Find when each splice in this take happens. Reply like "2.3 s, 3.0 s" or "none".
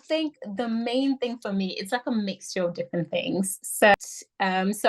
3.9 s